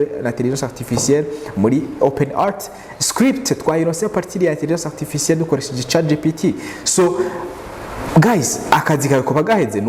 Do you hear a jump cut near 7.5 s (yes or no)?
no